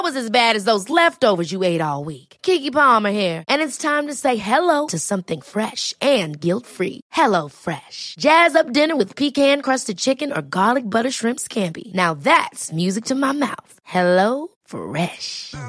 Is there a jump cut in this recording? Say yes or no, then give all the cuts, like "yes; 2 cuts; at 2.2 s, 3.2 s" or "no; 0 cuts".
no; 0 cuts